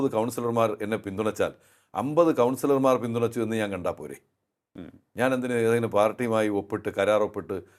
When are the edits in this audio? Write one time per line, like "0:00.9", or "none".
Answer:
none